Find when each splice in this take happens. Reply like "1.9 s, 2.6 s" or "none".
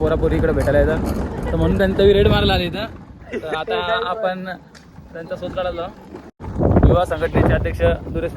6.3 s